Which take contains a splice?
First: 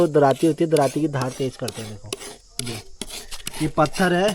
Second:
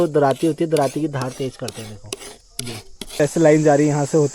second; 1 cut; at 3.2 s

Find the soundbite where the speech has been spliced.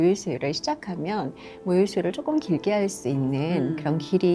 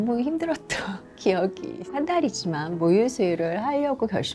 second; 1 cut; at 1.9 s

